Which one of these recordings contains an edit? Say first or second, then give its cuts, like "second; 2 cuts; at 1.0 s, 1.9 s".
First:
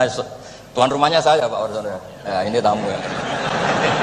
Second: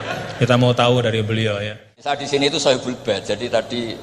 second; 1 cut; at 1.9 s